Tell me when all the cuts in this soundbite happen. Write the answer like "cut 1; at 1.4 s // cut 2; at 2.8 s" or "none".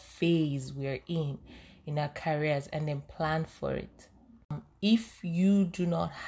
cut 1; at 4.6 s